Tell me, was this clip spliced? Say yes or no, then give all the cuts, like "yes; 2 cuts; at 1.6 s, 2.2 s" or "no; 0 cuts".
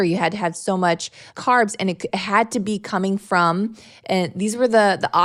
no; 0 cuts